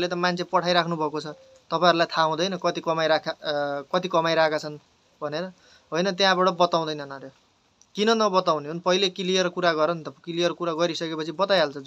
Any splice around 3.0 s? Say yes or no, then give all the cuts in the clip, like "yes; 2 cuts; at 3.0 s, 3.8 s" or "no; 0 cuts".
no; 0 cuts